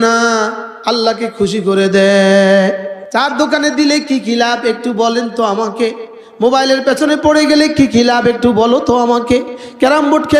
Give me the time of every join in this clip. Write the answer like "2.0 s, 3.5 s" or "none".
2.9 s